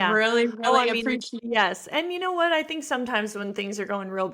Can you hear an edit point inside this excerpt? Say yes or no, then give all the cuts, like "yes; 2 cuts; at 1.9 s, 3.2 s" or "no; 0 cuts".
yes; 1 cut; at 1.3 s